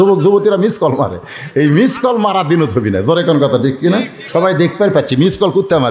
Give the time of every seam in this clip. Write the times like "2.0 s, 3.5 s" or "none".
none